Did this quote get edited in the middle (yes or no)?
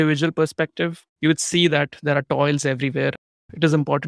yes